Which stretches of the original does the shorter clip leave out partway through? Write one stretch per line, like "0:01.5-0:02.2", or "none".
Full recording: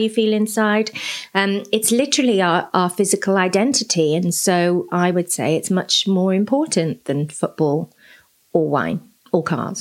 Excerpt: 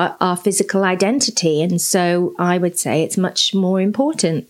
none